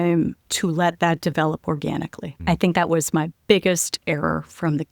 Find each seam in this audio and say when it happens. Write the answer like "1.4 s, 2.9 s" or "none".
2.2 s